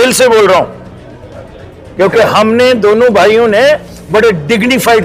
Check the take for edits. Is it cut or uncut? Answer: uncut